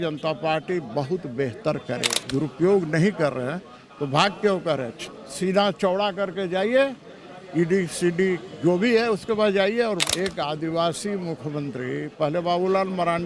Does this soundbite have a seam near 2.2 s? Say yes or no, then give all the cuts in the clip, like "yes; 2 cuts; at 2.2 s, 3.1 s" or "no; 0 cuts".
yes; 2 cuts; at 2.2 s, 10.0 s